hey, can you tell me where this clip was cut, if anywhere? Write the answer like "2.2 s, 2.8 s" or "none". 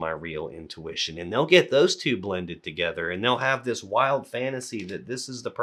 none